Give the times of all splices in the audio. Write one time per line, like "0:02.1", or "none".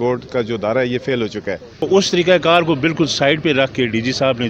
0:01.8